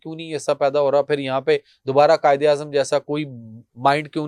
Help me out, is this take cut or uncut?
uncut